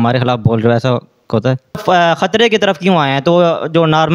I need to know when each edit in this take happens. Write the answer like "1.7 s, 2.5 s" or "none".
1.8 s